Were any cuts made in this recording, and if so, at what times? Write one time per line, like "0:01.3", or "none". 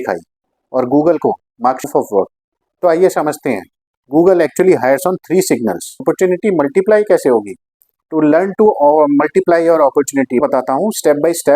0:01.8
0:06.0
0:10.4